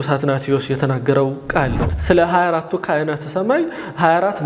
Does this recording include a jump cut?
yes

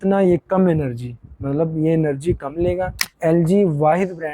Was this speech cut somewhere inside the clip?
yes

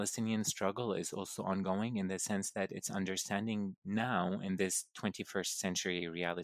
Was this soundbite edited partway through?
no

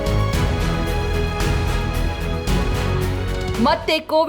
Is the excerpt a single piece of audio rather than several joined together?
no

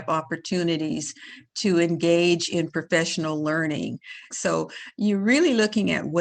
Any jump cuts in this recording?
yes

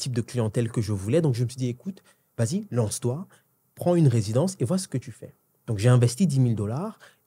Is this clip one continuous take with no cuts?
yes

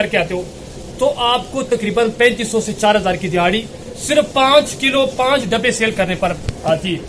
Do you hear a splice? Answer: no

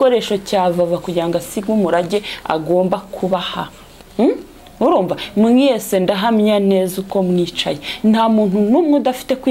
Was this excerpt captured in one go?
yes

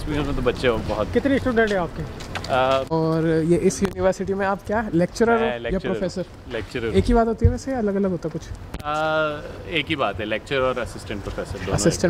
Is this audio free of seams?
no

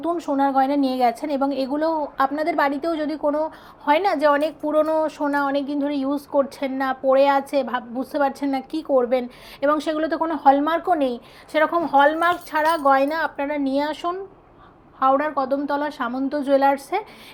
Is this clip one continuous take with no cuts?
yes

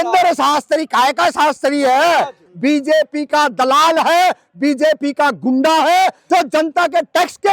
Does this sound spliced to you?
yes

